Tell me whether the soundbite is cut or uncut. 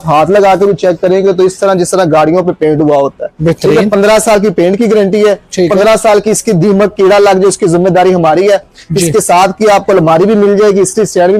uncut